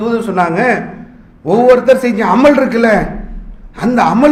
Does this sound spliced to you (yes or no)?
no